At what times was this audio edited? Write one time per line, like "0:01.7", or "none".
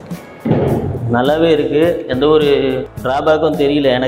0:02.9